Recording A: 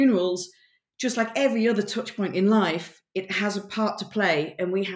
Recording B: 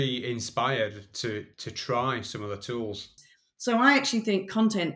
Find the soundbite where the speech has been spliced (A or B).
B